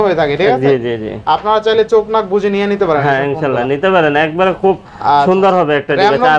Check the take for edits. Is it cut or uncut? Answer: uncut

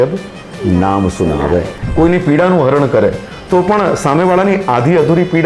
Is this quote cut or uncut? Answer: cut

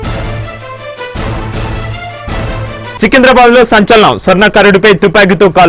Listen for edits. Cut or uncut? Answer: cut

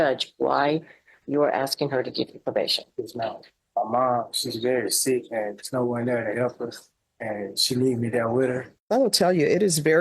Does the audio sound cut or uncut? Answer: cut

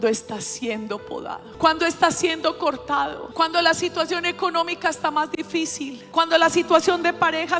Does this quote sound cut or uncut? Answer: cut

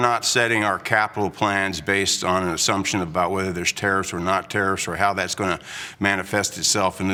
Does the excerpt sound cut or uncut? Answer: uncut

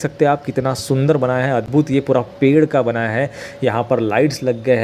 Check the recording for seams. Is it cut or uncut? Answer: uncut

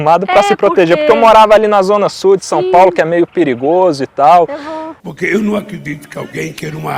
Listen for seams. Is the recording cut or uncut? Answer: uncut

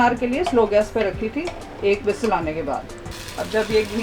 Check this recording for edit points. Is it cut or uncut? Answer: cut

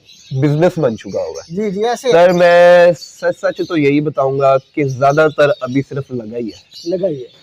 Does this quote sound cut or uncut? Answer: cut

